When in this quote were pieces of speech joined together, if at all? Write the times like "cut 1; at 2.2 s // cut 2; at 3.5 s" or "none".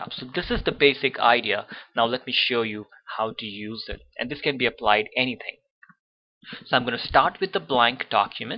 none